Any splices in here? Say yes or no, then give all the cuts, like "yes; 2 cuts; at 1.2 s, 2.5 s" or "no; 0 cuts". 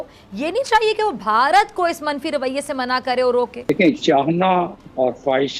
yes; 1 cut; at 3.6 s